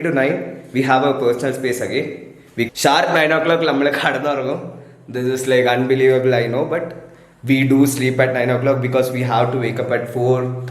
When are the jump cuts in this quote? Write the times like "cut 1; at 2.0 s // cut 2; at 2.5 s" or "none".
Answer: cut 1; at 2.7 s